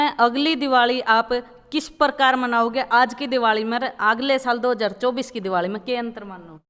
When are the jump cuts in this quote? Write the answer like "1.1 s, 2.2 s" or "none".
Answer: none